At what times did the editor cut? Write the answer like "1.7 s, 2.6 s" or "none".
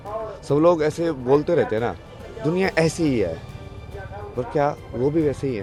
none